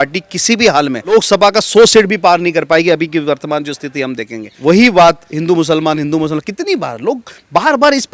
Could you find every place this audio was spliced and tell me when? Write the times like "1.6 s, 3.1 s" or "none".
1.1 s, 4.4 s